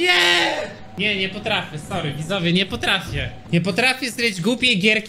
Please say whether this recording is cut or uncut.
cut